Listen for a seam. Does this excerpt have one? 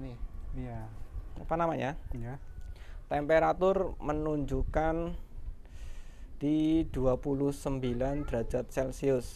yes; 1 cut; at 1.3 s

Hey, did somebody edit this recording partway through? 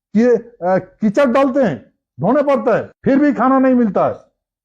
yes; 1 cut; at 2.9 s

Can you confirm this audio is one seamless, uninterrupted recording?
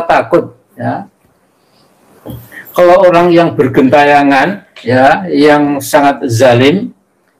yes; 0 cuts

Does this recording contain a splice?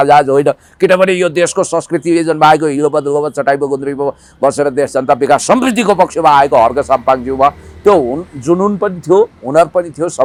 no; 0 cuts

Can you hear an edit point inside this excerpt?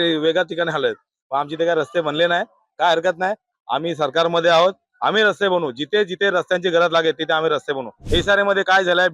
yes; 1 cut; at 7.9 s

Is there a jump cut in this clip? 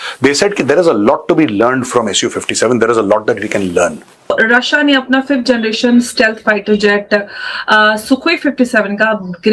yes; 1 cut; at 4.1 s

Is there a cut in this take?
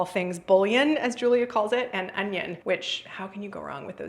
yes; 1 cut; at 2.6 s

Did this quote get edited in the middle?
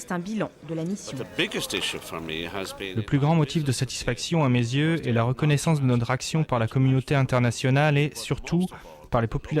yes; 2 cuts; at 1.2 s, 2.9 s

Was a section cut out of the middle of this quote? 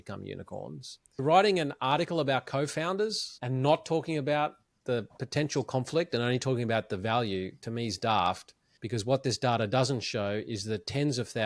yes; 1 cut; at 1.2 s

